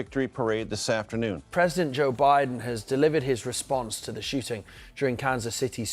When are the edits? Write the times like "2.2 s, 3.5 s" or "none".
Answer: 1.4 s